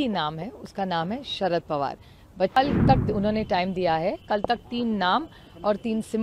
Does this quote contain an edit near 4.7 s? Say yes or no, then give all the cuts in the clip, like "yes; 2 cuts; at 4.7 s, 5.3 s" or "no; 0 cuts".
no; 1 cut; at 2.6 s